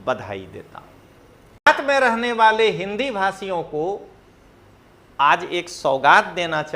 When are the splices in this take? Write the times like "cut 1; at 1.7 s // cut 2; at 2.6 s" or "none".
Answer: cut 1; at 1.7 s